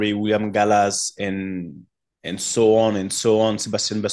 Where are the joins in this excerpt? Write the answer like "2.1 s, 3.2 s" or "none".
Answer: none